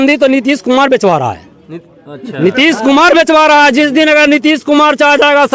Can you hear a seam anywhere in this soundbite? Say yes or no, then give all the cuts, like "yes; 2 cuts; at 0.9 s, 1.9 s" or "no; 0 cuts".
no; 0 cuts